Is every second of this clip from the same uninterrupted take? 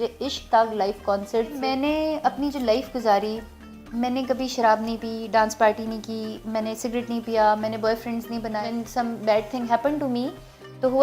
no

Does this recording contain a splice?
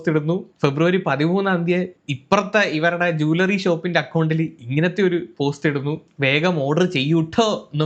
no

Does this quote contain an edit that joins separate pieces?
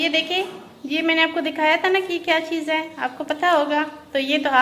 no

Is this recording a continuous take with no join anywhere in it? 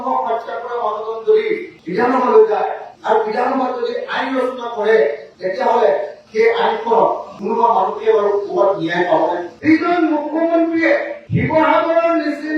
no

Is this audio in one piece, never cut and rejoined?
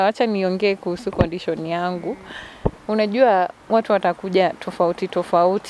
yes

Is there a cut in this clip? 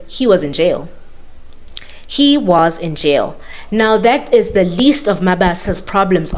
no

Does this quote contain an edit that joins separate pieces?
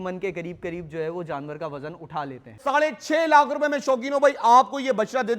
yes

